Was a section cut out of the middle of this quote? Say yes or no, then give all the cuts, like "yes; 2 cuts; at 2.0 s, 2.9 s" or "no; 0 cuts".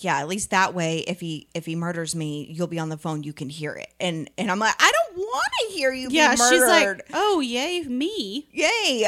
no; 0 cuts